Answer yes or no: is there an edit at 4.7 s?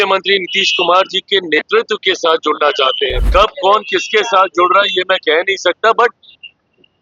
no